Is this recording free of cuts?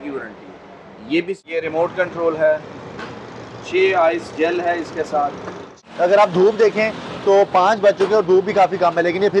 no; 2 cuts; at 1.4 s, 5.8 s

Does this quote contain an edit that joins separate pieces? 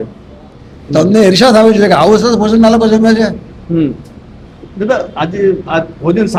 no; 0 cuts

